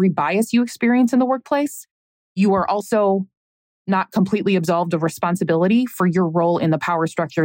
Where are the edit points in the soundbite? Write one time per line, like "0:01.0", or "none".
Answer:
none